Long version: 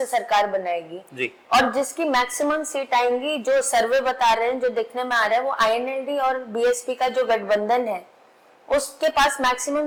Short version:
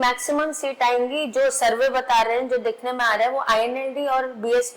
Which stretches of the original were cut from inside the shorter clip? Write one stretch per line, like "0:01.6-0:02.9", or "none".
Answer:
none